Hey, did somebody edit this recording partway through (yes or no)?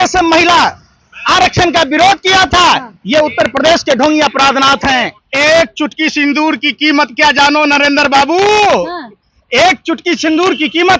yes